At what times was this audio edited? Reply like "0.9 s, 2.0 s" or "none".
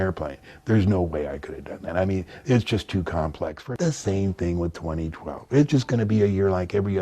3.6 s